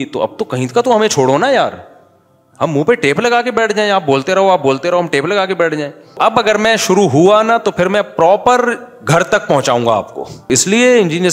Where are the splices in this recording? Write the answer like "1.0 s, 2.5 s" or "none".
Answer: 6.1 s, 10.5 s